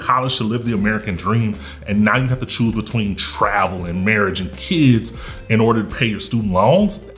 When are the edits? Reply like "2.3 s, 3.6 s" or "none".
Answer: none